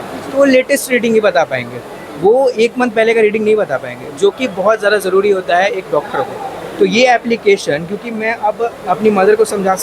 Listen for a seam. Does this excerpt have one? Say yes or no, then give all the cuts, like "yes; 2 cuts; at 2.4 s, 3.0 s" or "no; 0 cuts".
no; 0 cuts